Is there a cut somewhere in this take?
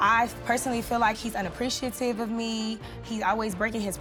no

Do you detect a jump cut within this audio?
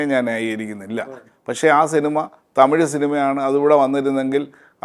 no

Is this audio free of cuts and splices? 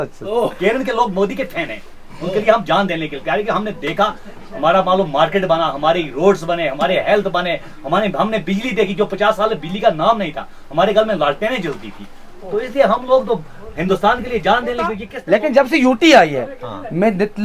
no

